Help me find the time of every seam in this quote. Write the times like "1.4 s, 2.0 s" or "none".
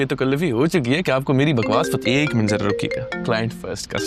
none